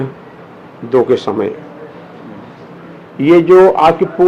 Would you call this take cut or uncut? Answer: uncut